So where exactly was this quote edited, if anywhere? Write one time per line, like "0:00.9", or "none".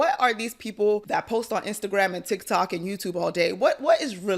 0:01.0